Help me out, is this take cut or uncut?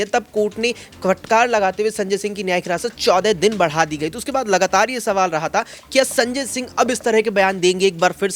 uncut